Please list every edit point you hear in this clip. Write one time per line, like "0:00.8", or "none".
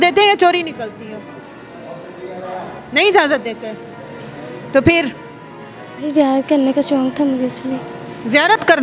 none